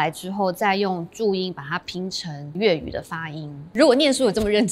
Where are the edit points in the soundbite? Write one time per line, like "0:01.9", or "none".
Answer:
0:02.5